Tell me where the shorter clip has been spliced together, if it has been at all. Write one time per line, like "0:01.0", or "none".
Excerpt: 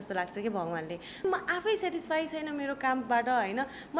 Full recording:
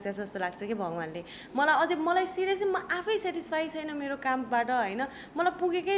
0:01.2